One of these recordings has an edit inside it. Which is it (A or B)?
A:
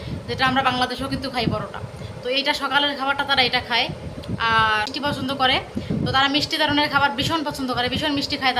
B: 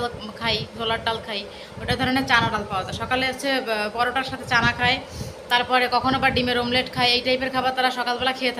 A